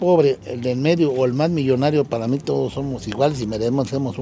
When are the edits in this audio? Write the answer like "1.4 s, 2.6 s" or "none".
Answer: none